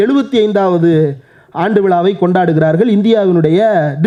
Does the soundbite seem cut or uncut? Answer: uncut